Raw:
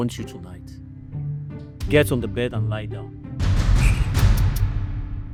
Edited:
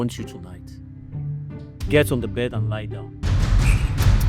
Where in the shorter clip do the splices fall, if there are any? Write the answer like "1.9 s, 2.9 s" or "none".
3.2 s